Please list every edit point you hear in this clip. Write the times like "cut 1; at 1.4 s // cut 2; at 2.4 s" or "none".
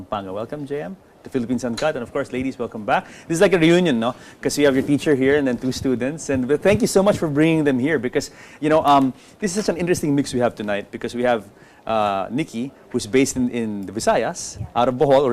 none